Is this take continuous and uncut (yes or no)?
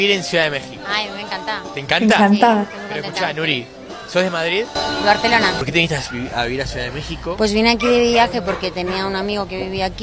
yes